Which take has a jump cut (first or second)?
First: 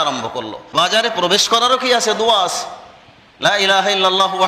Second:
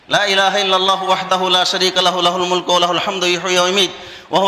first